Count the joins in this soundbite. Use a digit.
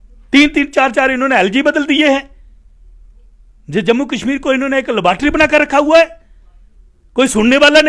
0